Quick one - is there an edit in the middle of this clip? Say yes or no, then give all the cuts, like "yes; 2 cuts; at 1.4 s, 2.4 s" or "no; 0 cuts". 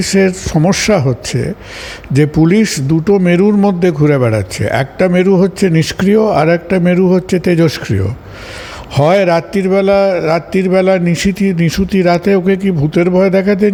no; 0 cuts